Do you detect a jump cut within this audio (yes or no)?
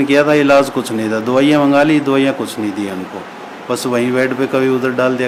no